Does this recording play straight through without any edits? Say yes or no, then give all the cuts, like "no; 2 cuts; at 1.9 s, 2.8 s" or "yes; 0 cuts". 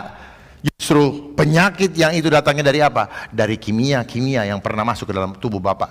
yes; 0 cuts